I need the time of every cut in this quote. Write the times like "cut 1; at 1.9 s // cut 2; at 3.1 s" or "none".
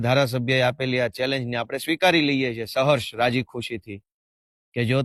none